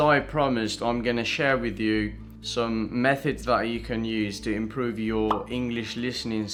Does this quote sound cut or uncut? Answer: uncut